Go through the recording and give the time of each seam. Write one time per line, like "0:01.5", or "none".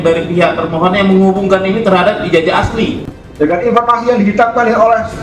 0:03.2